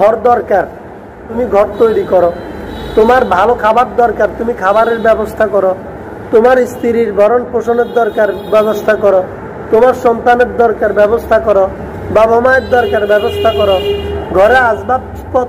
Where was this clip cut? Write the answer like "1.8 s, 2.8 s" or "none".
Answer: 1.2 s